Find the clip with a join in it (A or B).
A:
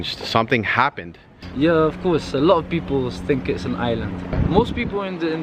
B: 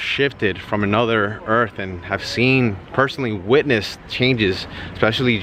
A